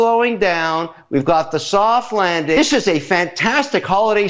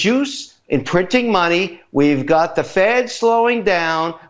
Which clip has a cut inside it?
first; 1 cut; at 2.6 s

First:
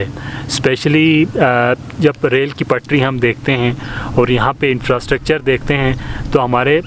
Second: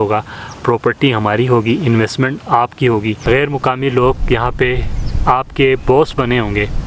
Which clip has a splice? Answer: second; 1 cut; at 3.2 s

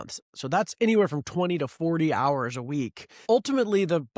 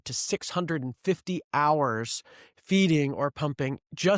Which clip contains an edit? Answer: first; 1 cut; at 3.1 s

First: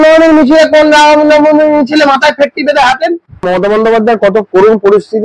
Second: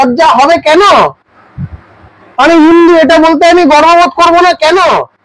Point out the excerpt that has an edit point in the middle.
first; 1 cut; at 3.5 s

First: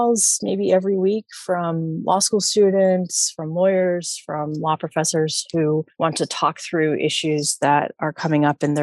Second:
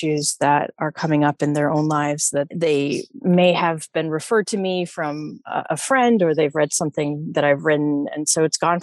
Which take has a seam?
first; 1 cut; at 5.9 s

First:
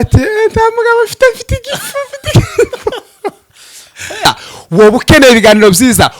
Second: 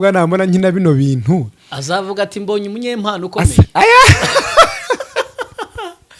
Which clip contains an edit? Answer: first; 1 cut; at 4.3 s

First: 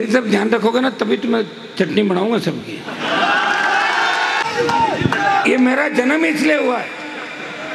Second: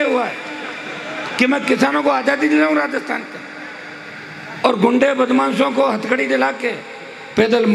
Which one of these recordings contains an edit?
first; 1 cut; at 4.4 s

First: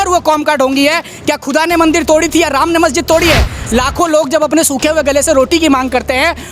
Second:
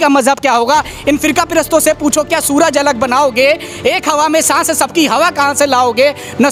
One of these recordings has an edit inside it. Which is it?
first; 1 cut; at 3.6 s

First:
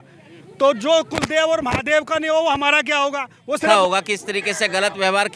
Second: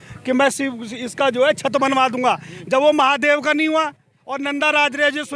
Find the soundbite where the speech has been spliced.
first; 1 cut; at 3.7 s

